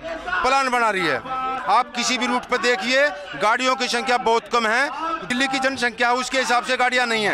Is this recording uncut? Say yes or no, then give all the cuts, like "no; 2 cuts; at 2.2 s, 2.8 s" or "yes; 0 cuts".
no; 2 cuts; at 1.6 s, 5.3 s